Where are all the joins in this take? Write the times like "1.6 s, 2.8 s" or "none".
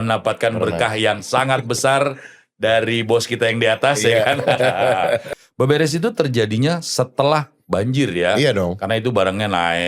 5.3 s